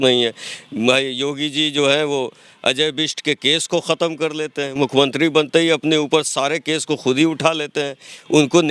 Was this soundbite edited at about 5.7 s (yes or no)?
no